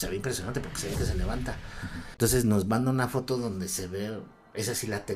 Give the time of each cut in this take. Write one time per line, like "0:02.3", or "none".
0:02.0